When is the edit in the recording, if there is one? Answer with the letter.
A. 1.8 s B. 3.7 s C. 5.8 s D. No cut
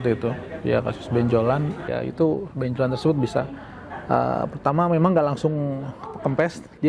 A